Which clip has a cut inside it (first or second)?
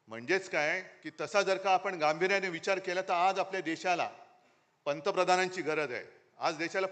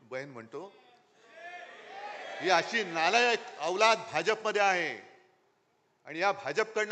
first